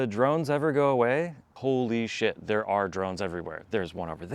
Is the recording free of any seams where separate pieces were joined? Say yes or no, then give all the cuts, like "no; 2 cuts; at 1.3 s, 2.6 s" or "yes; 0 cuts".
no; 1 cut; at 1.5 s